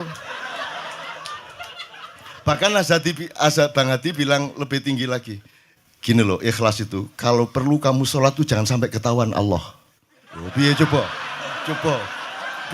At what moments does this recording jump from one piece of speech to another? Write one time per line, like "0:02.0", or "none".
none